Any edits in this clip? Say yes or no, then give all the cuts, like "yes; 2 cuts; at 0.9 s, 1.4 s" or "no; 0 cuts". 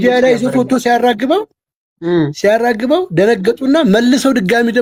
no; 0 cuts